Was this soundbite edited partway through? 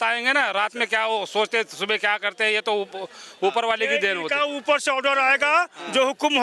no; 0 cuts

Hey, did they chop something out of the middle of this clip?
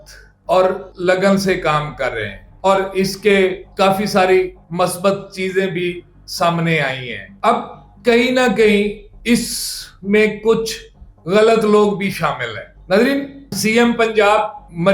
no; 0 cuts

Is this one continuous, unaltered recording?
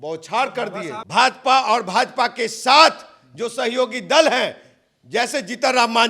no; 1 cut; at 0.9 s

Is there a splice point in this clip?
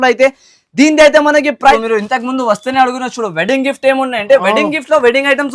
yes; 1 cut; at 1.7 s

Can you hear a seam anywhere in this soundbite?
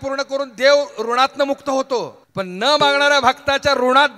yes; 1 cut; at 2.2 s

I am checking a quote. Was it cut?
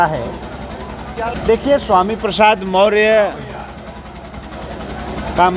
yes; 1 cut; at 1.3 s

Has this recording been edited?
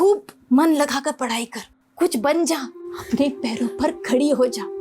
no; 0 cuts

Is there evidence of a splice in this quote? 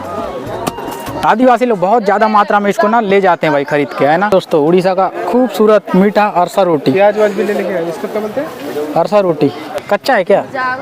yes; 3 cuts; at 1.2 s, 4.3 s, 9.8 s

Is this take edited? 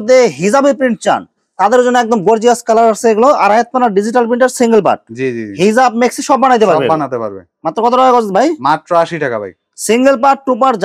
no; 0 cuts

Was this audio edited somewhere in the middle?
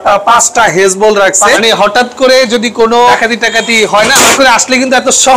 yes; 3 cuts; at 1.6 s, 3.1 s, 4.3 s

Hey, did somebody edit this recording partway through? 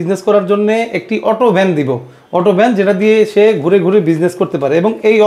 no; 0 cuts

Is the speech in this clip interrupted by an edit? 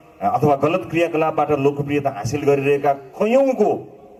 no; 0 cuts

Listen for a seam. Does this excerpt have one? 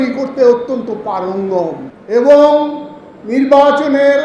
yes; 1 cut; at 1.9 s

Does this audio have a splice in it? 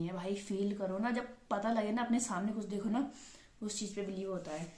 no; 0 cuts

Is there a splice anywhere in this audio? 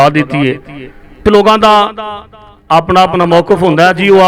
yes; 1 cut; at 1.2 s

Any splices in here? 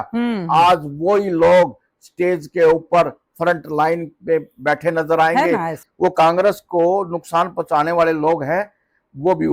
yes; 1 cut; at 5.8 s

